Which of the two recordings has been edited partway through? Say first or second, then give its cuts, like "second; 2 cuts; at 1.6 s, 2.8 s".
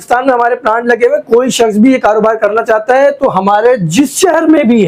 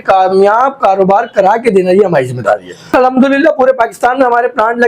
second; 1 cut; at 2.9 s